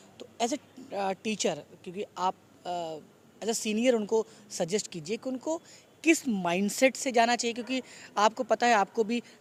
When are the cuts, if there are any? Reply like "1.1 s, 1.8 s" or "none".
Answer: none